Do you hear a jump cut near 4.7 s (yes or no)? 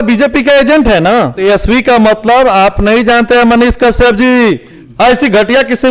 yes